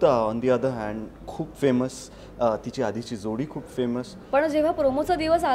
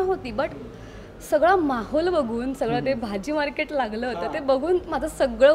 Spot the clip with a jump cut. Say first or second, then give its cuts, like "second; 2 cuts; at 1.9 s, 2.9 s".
first; 1 cut; at 4.2 s